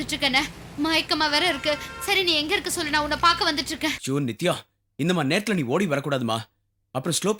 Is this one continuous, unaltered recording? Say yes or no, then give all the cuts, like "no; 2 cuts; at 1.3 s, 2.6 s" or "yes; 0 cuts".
yes; 0 cuts